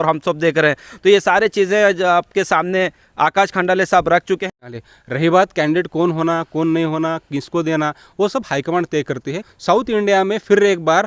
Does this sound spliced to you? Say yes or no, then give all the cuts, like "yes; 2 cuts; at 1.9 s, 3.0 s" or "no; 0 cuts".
yes; 2 cuts; at 4.4 s, 9.5 s